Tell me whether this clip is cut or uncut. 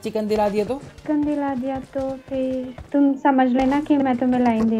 cut